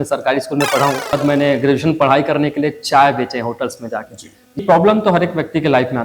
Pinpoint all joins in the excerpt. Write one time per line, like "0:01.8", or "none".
0:01.1
0:04.6